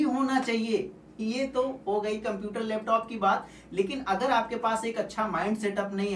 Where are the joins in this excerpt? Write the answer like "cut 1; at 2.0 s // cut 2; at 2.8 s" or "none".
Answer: none